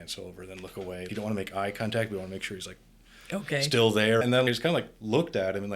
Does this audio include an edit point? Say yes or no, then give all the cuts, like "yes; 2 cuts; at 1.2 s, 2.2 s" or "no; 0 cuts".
yes; 2 cuts; at 1.1 s, 4.2 s